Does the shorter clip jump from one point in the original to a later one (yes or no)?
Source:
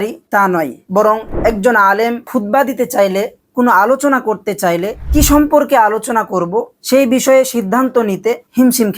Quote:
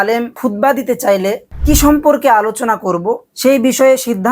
yes